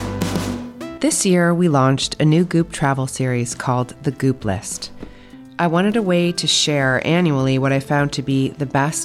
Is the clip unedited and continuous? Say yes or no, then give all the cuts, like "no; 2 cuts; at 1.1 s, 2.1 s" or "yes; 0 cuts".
no; 1 cut; at 0.9 s